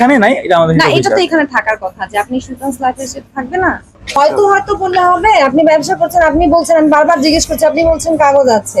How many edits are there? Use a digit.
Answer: 1